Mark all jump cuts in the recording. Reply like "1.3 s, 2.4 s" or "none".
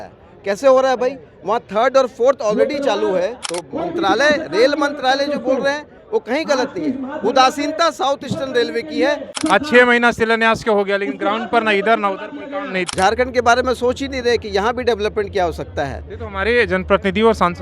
3.5 s, 9.3 s, 12.9 s

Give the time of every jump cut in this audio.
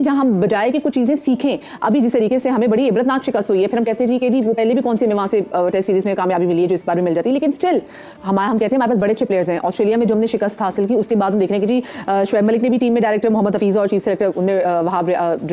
none

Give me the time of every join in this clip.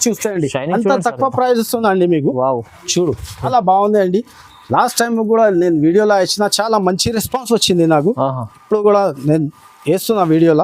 3.5 s

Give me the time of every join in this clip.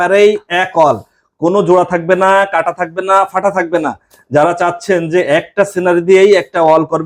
none

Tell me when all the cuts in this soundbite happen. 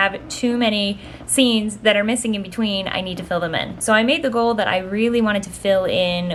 none

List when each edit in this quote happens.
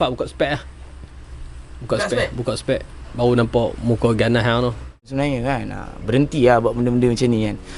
5.1 s

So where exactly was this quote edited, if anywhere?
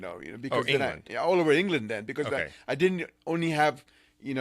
none

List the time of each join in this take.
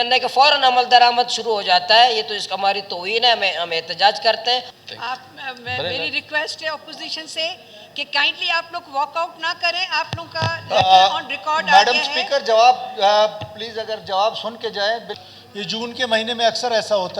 4.7 s, 15.1 s

